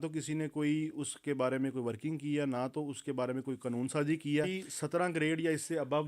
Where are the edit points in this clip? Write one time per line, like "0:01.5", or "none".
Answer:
0:04.5